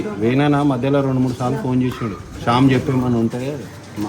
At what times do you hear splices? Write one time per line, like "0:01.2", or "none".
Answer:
none